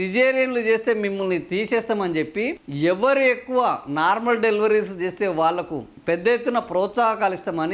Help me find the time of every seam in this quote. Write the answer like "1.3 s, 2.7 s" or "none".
none

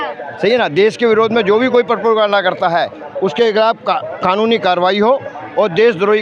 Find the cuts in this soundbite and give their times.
none

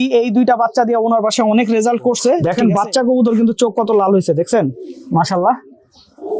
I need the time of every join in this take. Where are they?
2.4 s

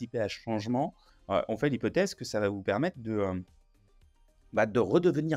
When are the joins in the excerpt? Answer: 1.1 s

